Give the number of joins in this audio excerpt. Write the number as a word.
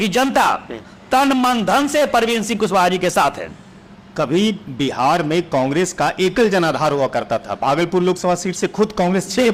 zero